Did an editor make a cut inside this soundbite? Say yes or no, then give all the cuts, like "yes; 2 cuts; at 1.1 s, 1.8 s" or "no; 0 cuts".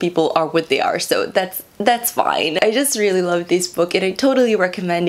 no; 0 cuts